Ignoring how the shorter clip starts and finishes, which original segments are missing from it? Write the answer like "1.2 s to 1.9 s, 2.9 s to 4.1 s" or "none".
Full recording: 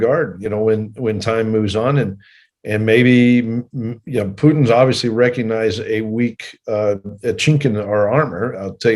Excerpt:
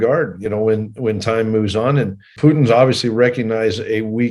2.3 s to 4.3 s